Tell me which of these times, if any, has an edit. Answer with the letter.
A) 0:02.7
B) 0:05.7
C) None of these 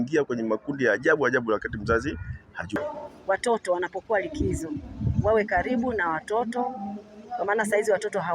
A